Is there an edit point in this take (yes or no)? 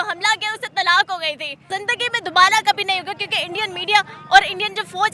yes